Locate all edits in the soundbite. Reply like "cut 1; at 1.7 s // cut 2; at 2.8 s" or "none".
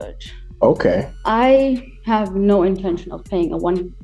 cut 1; at 1.1 s

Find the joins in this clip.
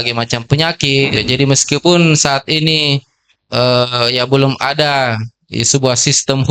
cut 1; at 1.2 s

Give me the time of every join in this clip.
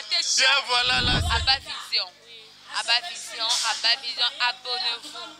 cut 1; at 1.2 s

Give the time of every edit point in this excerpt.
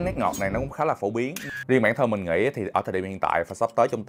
cut 1; at 1.5 s

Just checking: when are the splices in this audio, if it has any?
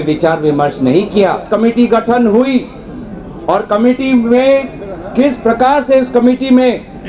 cut 1; at 1.5 s

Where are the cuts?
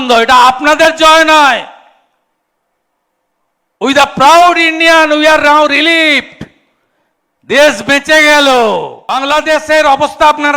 cut 1; at 9.0 s

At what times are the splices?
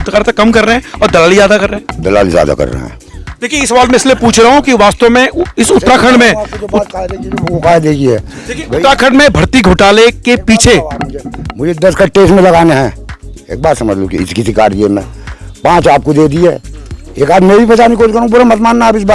none

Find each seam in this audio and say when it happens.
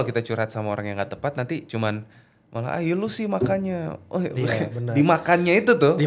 none

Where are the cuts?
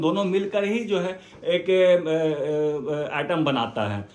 none

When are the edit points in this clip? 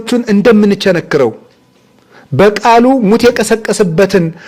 none

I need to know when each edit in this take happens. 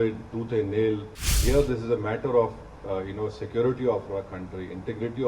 cut 1; at 1.4 s

